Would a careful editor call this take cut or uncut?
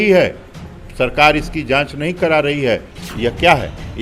cut